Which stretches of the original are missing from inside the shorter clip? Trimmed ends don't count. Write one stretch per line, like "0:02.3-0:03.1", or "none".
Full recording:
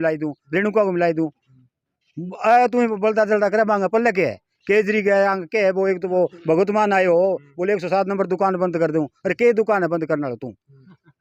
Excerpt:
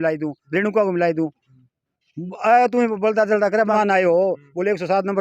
0:03.7-0:06.7